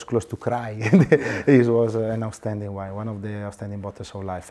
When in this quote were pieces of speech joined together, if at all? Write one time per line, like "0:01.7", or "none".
none